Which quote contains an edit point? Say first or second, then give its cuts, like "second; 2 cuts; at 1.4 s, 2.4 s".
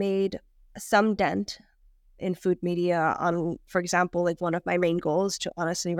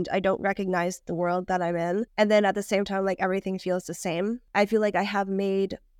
second; 2 cuts; at 2.1 s, 4.4 s